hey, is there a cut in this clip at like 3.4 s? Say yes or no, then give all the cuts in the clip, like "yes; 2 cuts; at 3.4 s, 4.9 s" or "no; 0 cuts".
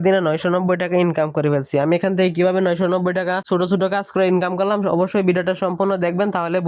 yes; 1 cut; at 3.4 s